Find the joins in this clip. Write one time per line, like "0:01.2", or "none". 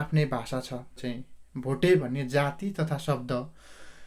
0:01.1